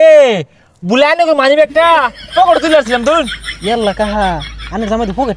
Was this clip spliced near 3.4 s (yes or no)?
yes